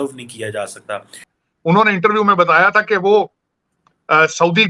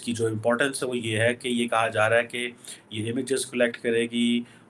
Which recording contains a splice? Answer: first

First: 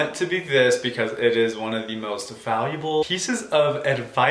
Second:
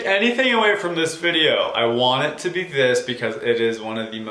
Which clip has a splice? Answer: first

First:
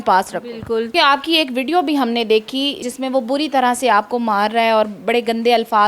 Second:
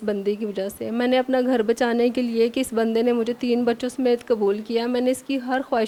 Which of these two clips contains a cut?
first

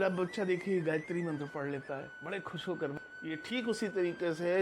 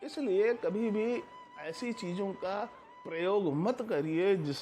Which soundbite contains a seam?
first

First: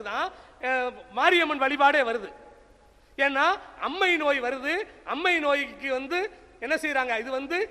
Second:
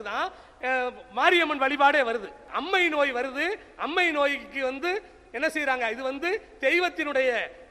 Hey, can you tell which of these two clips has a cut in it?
second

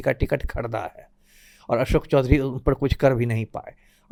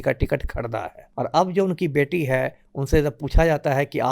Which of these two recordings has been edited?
second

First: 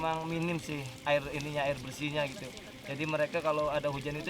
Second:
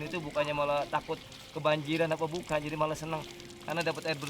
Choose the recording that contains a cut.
first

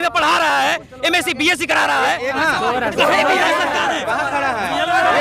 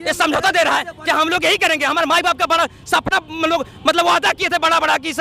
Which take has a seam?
first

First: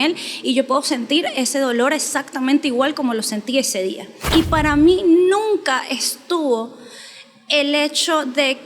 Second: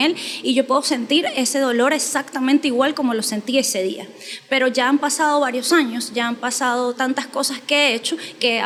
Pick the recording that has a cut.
first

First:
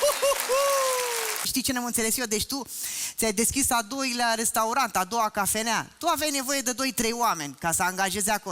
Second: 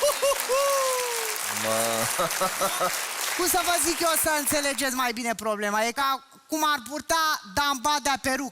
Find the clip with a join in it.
first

